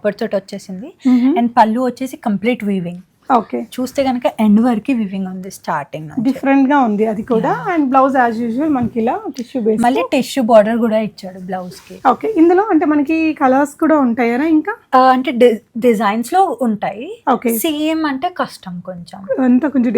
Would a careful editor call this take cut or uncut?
uncut